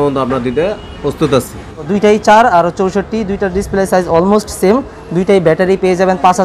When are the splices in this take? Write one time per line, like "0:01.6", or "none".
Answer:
0:01.9